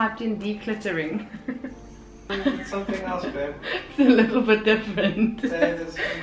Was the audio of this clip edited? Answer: yes; 1 cut; at 2.3 s

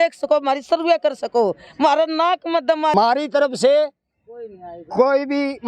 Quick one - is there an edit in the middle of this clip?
yes; 1 cut; at 2.9 s

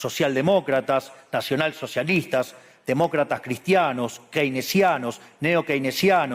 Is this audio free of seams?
yes; 0 cuts

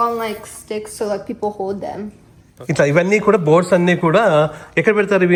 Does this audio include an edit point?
no; 0 cuts

